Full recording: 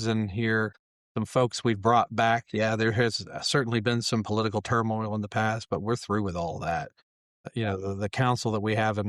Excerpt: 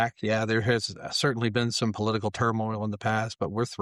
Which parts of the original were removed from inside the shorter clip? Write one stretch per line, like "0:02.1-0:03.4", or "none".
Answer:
none